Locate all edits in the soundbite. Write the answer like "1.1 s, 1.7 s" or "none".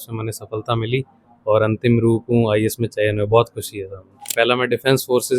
4.3 s

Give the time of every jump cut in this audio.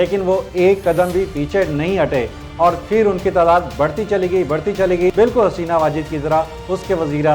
5.1 s

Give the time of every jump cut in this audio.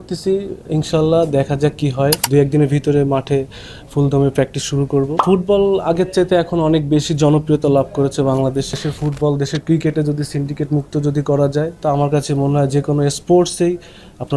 2.2 s, 5.2 s, 8.7 s

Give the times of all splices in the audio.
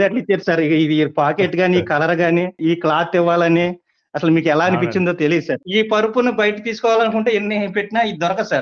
2.6 s, 5.6 s

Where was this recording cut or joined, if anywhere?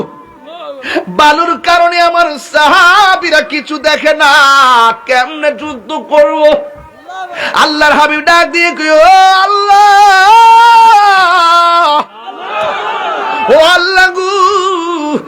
7.4 s

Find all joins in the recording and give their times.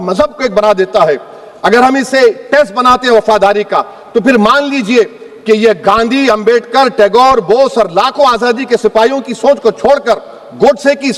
none

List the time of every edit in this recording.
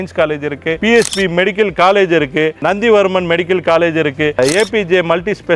4.4 s

